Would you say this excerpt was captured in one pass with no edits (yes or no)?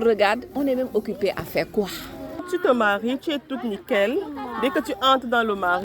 no